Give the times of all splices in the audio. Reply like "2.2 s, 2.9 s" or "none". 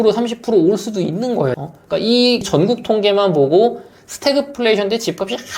1.6 s